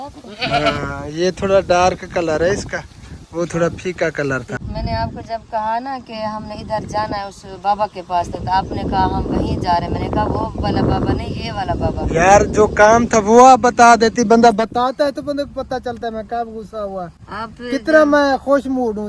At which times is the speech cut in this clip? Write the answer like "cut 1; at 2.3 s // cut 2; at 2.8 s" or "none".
cut 1; at 4.6 s